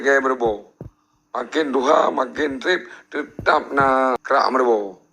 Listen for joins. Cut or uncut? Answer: cut